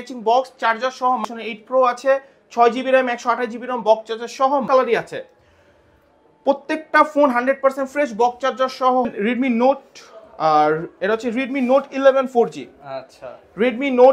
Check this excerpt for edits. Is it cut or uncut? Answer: cut